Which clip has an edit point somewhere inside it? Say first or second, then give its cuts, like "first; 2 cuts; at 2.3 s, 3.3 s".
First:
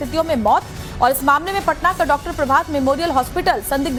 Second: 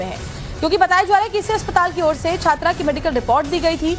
second; 1 cut; at 1.9 s